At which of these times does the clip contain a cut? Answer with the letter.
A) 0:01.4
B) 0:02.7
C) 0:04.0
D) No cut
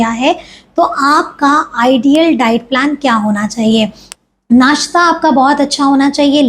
C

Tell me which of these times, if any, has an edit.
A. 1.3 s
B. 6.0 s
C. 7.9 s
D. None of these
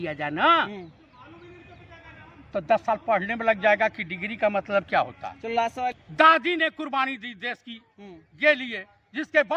B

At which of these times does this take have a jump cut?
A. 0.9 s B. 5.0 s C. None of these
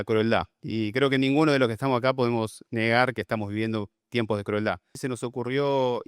B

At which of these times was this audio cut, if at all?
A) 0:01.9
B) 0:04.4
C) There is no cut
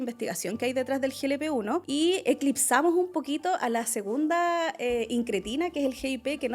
A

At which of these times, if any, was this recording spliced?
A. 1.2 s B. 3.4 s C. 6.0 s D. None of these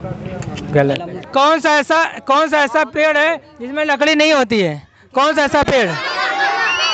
A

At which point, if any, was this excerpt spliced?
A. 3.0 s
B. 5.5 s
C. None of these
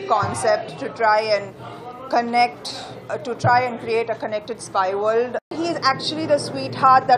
B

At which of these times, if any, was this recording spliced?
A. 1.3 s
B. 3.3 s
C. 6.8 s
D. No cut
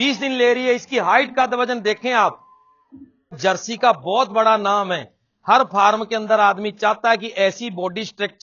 B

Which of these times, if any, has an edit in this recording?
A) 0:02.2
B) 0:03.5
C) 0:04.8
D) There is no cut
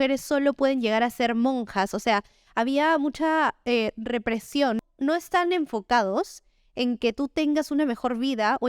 C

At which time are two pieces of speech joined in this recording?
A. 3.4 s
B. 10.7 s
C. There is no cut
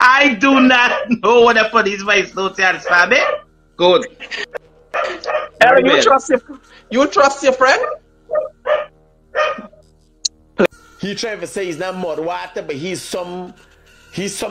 B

